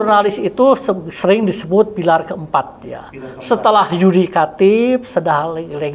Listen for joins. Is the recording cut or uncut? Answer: uncut